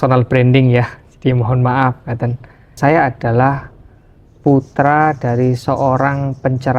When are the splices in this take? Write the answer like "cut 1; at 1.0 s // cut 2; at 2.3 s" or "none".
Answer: cut 1; at 2.7 s